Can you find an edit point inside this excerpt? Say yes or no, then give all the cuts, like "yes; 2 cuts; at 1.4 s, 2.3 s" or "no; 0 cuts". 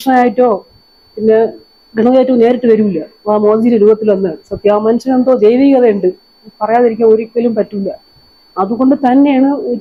no; 0 cuts